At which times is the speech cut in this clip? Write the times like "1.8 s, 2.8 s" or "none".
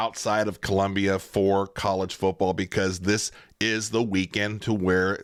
none

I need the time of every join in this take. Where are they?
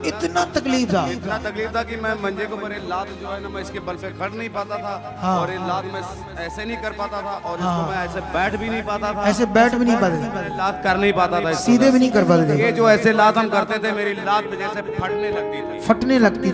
none

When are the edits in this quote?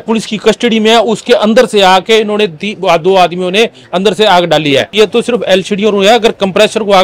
4.9 s

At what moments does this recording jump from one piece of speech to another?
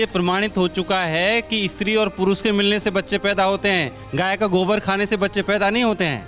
none

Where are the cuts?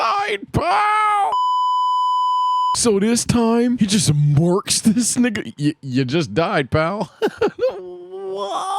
none

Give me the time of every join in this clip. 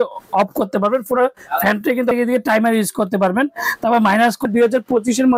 2.1 s, 4.5 s

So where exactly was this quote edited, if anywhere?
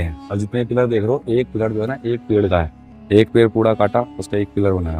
none

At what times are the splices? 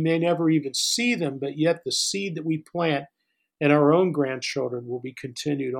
none

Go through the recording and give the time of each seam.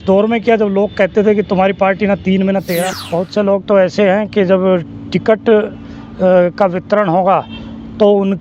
2.9 s

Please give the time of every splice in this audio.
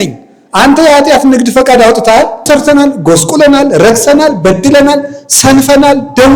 2.5 s

